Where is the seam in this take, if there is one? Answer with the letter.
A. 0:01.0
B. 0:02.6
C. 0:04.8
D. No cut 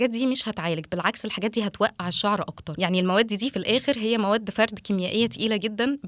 B